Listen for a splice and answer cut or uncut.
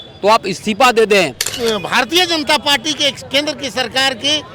cut